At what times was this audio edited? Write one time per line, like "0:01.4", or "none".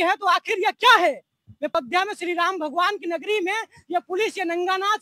0:01.8

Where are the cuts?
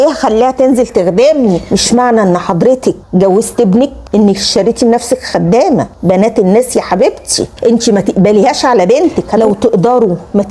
0:01.6
0:07.5
0:09.3

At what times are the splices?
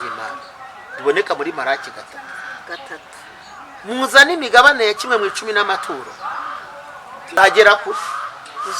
0:07.4

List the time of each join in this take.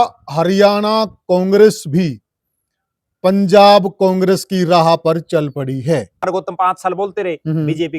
0:06.3

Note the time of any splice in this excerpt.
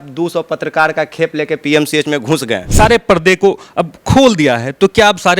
0:02.7

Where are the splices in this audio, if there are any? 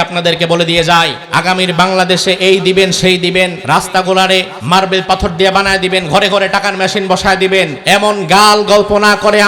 0:01.2
0:03.6
0:04.5
0:07.8

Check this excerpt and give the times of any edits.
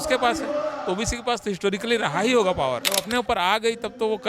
0:03.0

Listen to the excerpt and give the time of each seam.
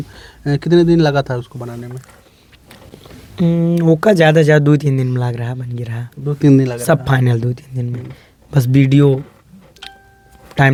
none

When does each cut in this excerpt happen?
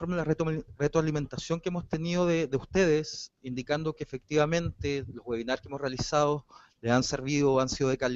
none

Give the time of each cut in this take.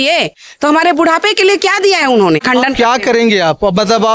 0:02.4

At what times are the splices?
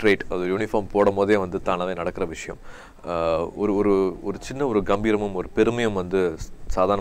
none

